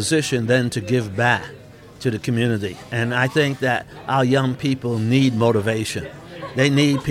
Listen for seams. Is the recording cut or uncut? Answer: uncut